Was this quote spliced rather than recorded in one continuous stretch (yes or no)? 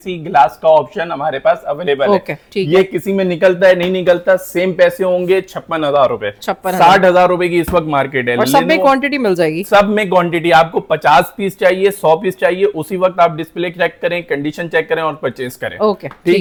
no